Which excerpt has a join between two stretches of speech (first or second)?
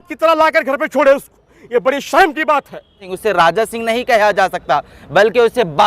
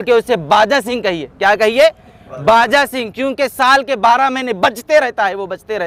first